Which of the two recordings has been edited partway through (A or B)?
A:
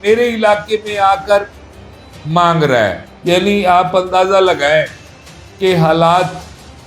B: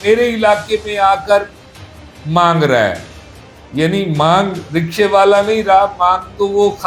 A